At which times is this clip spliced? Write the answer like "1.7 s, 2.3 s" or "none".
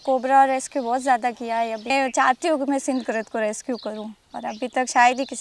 1.9 s